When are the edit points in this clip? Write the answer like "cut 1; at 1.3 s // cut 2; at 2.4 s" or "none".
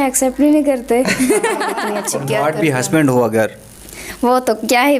cut 1; at 1.9 s